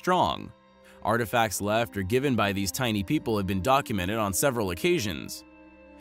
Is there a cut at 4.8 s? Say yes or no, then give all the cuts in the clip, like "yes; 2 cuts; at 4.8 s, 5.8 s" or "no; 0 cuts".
yes; 1 cut; at 4.8 s